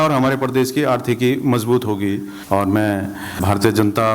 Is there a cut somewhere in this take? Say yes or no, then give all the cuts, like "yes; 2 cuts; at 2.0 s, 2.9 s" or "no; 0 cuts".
yes; 1 cut; at 2.5 s